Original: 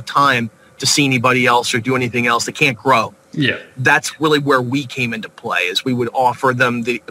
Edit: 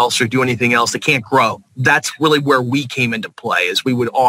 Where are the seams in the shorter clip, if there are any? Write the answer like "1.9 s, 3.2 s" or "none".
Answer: 1.7 s